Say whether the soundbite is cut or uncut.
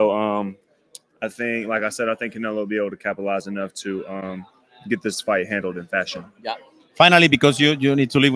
uncut